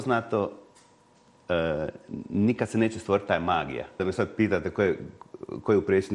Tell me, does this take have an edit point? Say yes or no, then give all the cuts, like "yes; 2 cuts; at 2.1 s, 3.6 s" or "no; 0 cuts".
yes; 1 cut; at 4.0 s